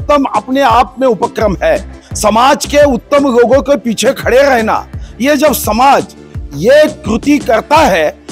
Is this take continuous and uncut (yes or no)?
yes